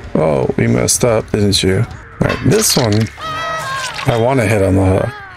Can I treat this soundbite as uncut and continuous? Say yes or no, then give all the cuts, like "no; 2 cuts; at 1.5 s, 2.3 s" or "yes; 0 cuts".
no; 1 cut; at 2.0 s